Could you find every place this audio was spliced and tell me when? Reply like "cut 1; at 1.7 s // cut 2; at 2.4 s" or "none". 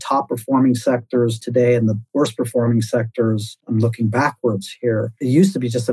cut 1; at 2.0 s // cut 2; at 3.5 s // cut 3; at 5.2 s